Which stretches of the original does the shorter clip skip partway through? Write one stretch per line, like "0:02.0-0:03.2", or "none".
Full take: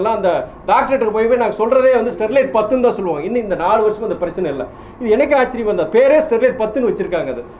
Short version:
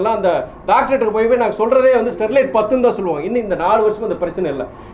none